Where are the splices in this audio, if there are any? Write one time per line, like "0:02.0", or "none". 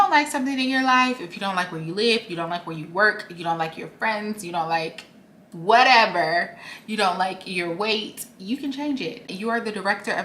0:09.3